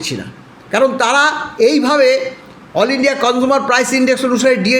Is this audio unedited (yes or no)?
yes